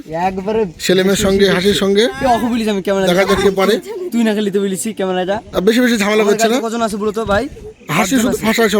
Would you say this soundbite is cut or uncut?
uncut